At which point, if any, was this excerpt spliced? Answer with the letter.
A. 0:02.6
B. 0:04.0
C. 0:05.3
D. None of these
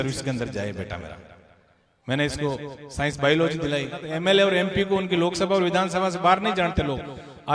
B